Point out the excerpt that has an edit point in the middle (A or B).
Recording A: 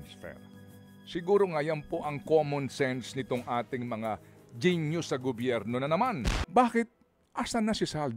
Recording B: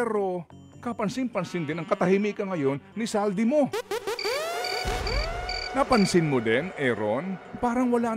A